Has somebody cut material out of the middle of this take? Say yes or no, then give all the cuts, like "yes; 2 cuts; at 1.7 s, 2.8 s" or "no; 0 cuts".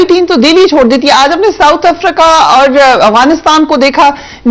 no; 0 cuts